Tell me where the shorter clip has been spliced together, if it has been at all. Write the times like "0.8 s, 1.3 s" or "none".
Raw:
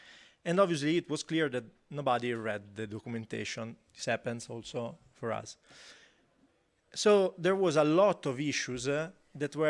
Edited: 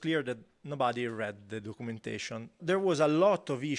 2.6 s